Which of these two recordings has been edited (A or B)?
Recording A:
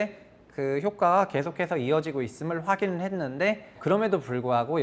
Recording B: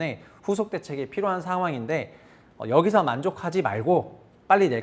A